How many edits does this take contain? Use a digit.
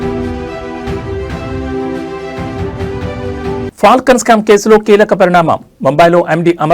1